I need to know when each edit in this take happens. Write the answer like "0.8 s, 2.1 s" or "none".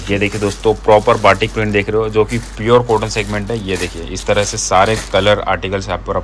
none